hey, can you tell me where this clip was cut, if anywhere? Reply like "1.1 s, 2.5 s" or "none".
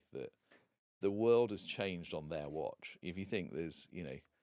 none

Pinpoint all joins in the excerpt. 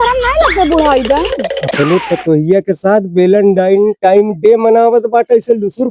1.6 s

